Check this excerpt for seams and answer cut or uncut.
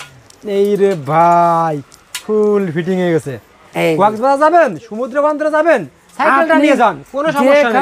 uncut